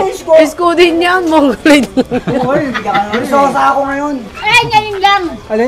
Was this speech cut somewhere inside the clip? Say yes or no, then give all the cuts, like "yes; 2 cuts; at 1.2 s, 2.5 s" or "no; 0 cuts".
no; 0 cuts